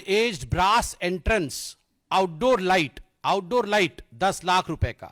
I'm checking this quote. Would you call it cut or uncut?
uncut